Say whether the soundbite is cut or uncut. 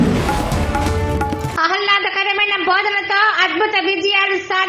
cut